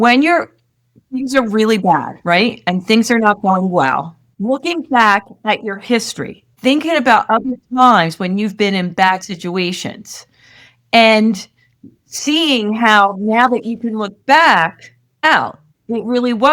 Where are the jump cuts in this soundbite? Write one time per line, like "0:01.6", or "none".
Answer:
none